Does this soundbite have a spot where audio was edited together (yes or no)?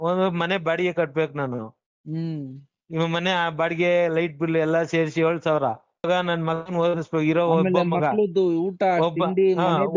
yes